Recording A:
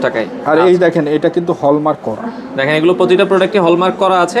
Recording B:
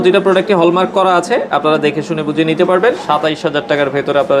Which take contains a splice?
B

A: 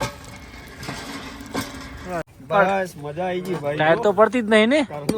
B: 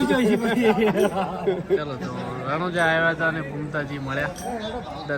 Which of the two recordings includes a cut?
A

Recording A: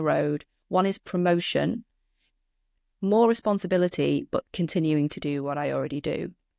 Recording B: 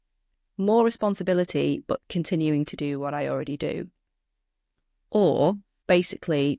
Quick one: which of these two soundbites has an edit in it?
B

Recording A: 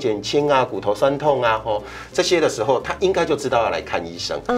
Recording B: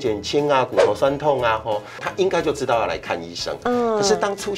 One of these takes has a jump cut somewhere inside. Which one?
B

